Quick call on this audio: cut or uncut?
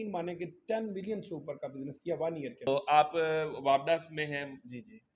cut